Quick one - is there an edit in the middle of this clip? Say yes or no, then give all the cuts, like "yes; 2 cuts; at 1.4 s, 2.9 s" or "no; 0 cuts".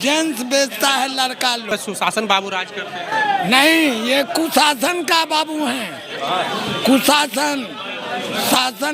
yes; 1 cut; at 1.7 s